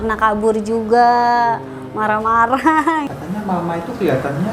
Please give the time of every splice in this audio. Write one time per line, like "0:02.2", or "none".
0:03.1